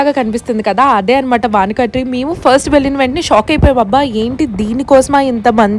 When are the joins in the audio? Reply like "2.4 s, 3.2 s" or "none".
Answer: none